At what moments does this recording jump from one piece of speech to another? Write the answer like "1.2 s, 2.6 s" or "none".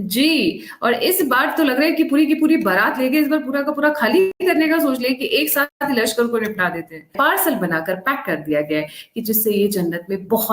4.4 s, 5.7 s, 7.1 s